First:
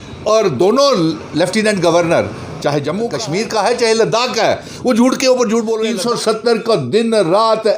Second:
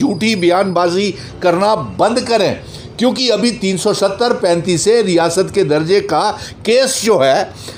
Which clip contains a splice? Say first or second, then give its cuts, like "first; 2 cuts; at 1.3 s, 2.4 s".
first; 2 cuts; at 3.1 s, 5.9 s